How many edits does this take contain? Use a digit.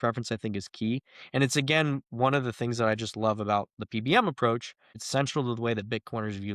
1